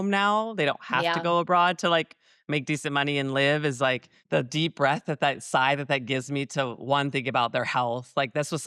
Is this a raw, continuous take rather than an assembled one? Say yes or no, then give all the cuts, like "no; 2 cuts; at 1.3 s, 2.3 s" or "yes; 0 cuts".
no; 1 cut; at 4.1 s